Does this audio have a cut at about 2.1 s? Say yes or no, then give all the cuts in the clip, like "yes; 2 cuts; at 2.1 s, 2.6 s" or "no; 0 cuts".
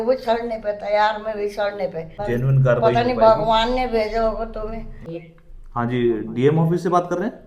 yes; 2 cuts; at 2.1 s, 5.0 s